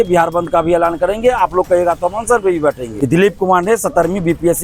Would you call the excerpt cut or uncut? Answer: cut